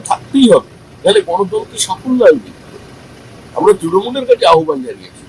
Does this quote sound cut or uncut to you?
uncut